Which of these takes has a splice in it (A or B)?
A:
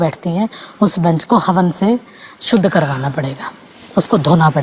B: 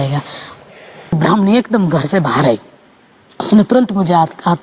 B